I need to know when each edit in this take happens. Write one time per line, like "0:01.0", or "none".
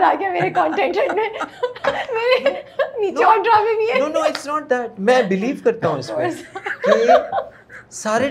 none